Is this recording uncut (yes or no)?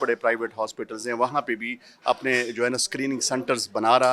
yes